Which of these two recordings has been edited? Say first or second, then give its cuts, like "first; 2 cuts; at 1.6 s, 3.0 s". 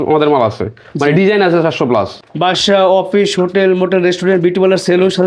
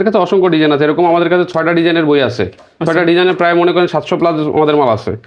first; 1 cut; at 2.2 s